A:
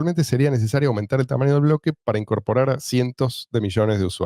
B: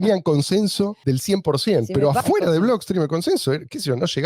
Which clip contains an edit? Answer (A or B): B